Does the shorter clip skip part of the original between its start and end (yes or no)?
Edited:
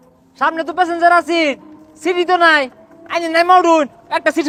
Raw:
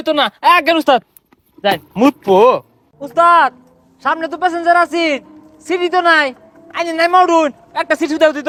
no